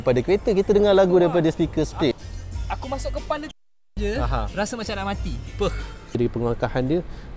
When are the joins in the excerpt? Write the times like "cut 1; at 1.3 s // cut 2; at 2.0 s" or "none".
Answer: cut 1; at 2.1 s // cut 2; at 6.1 s